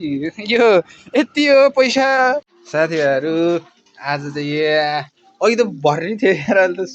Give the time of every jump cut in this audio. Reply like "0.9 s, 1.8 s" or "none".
2.6 s